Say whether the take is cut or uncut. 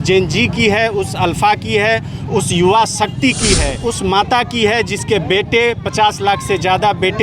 cut